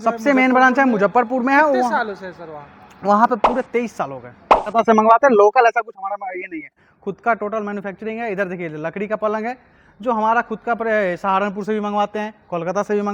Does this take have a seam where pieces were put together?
yes; 1 cut; at 4.6 s

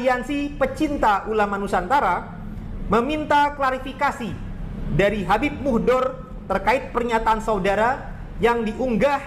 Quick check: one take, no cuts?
yes; 0 cuts

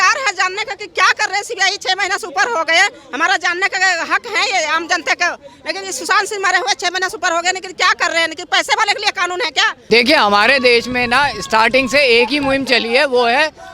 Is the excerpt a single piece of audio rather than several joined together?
no; 1 cut; at 9.7 s

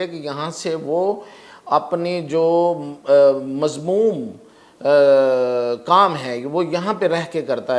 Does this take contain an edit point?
no; 0 cuts

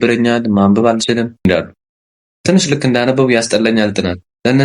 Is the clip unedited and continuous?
no; 1 cut; at 1.4 s

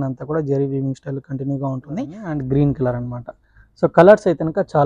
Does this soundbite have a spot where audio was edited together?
yes; 1 cut; at 2.2 s

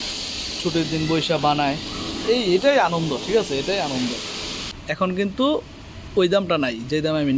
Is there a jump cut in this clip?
yes; 1 cut; at 4.7 s

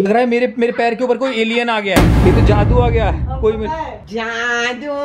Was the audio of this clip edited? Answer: no; 0 cuts

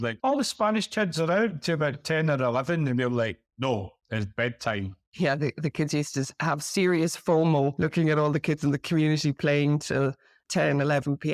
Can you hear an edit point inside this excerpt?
no; 0 cuts

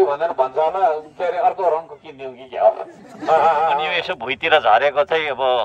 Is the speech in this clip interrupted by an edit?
yes; 1 cut; at 3.9 s

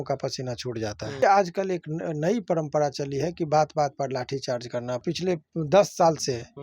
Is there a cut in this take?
yes; 2 cuts; at 1.2 s, 5.0 s

